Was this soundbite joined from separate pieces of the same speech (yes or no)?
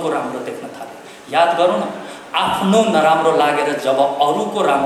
no